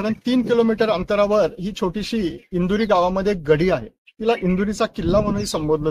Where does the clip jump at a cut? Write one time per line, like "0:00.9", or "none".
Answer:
none